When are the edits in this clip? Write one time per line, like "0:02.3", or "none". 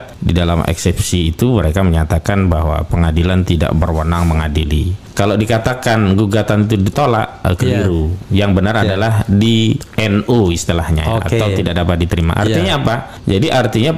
0:04.9